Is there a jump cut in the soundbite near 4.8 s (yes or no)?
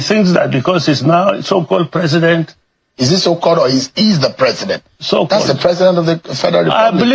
no